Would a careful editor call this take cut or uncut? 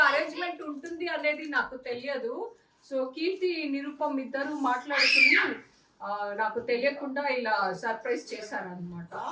uncut